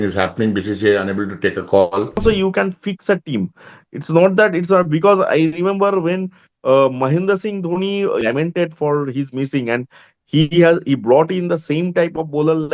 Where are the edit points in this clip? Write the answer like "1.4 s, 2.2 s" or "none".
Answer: 2.2 s, 8.2 s